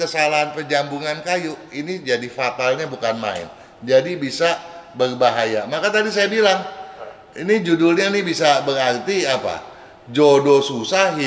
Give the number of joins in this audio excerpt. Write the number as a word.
zero